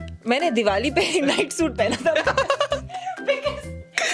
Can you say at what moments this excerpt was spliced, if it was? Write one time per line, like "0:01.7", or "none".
none